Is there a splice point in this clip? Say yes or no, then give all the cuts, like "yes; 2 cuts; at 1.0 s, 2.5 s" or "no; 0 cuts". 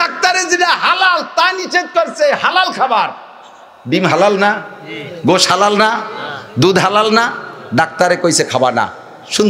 no; 0 cuts